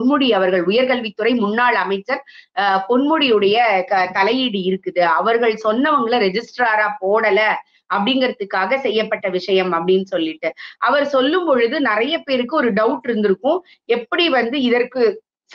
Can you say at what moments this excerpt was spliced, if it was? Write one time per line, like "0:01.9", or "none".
none